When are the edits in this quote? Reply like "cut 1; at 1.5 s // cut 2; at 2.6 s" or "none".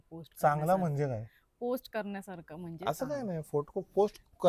none